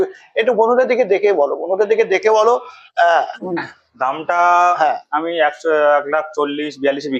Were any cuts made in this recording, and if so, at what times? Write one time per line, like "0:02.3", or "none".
none